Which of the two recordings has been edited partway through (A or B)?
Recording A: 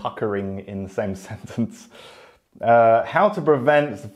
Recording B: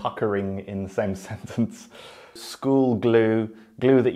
B